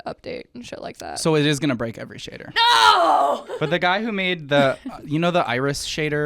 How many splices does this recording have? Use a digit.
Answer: 1